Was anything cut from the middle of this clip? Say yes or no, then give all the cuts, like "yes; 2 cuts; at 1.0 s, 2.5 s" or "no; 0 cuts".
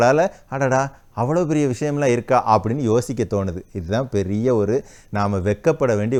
no; 0 cuts